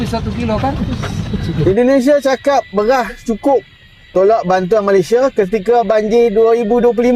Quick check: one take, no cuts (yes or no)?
no